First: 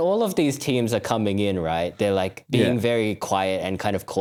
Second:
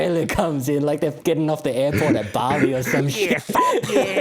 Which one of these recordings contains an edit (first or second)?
second